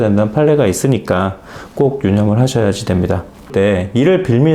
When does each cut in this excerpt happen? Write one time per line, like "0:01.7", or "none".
0:03.5